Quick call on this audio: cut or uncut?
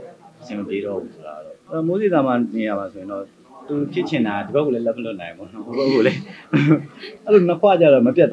cut